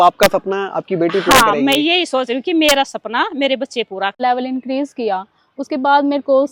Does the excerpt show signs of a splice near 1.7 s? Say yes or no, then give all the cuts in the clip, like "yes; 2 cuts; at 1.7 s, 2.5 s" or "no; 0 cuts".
no; 1 cut; at 4.1 s